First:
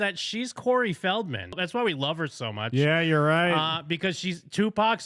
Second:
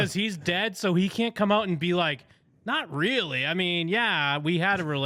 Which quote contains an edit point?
first; 1 cut; at 1.6 s

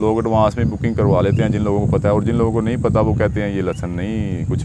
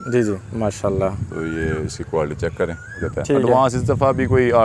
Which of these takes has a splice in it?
second; 1 cut; at 3.1 s

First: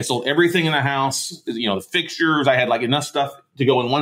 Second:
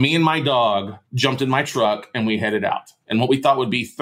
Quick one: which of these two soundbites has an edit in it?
second; 1 cut; at 1.0 s

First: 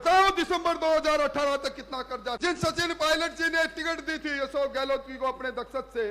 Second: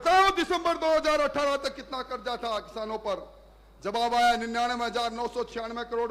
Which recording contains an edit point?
first; 1 cut; at 2.4 s

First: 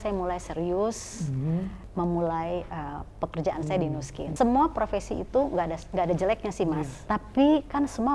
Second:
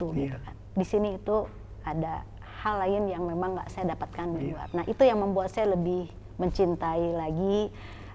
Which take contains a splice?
first; 3 cuts; at 1.8 s, 4.3 s, 7.0 s

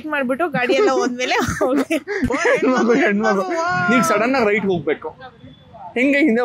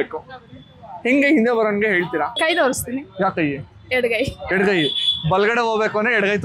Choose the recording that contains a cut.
first; 1 cut; at 3.8 s

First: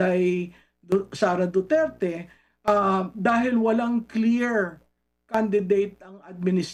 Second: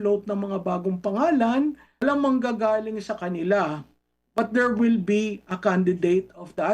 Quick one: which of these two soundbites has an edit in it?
second; 1 cut; at 1.9 s

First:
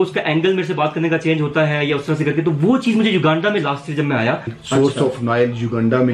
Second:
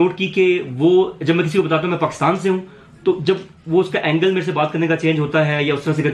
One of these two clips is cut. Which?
first; 1 cut; at 4.6 s

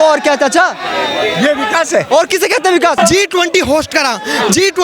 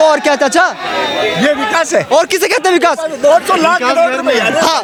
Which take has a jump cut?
first; 1 cut; at 3.0 s

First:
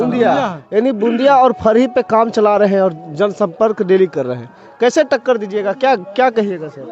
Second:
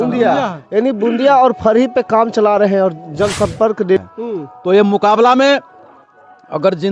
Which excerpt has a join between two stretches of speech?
second; 1 cut; at 4.0 s

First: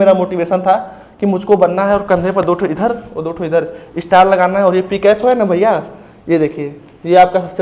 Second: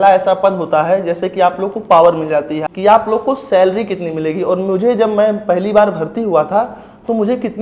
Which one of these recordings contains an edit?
second; 1 cut; at 2.6 s

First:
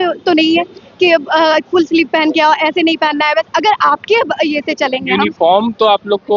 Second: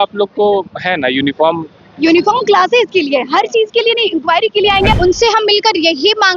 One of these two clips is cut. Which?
second; 1 cut; at 5.0 s

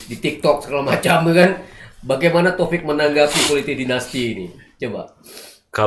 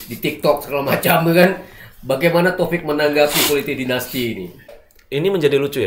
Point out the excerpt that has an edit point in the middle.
second; 1 cut; at 4.8 s

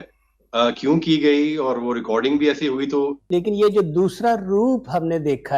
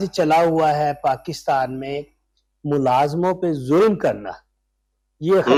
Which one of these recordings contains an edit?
first; 1 cut; at 3.2 s

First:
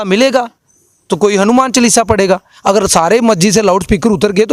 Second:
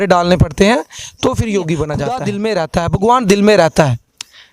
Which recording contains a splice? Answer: second; 1 cut; at 2.2 s

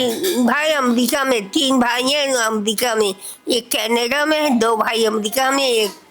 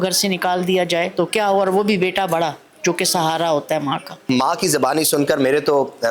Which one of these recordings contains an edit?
second; 2 cuts; at 1.1 s, 4.2 s

